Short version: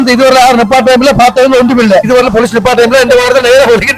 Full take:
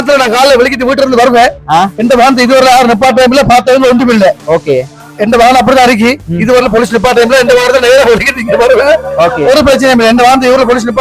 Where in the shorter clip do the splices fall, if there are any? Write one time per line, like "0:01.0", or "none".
0:02.1